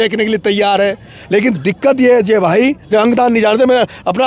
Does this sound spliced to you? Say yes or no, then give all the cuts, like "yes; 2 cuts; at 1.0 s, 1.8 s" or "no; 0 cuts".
yes; 1 cut; at 2.8 s